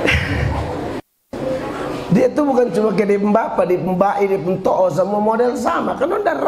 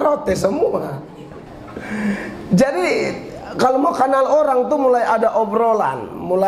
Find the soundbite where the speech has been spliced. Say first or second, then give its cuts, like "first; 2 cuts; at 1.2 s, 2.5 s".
second; 1 cut; at 1.4 s